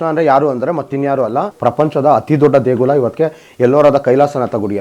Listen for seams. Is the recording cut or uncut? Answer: cut